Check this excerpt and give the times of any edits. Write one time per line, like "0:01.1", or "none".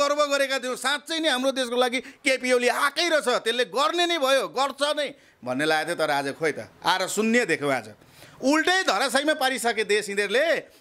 none